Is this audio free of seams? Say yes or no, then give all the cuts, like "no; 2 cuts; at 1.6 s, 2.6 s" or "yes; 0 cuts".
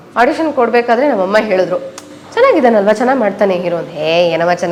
yes; 0 cuts